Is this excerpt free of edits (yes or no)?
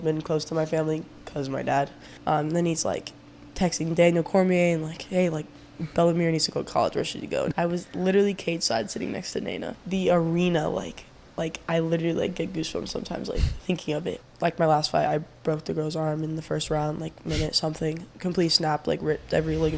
no